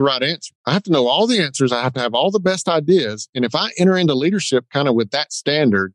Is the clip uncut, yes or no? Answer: yes